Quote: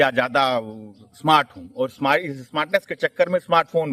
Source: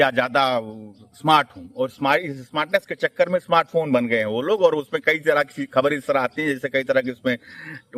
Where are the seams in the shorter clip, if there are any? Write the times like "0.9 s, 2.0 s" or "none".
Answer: none